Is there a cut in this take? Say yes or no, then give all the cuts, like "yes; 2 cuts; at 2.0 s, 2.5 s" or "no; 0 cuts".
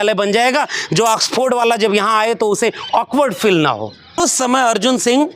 yes; 1 cut; at 4.2 s